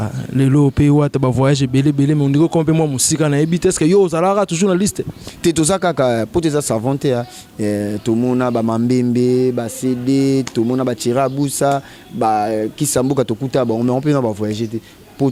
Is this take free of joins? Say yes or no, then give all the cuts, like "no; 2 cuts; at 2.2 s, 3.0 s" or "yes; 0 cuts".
yes; 0 cuts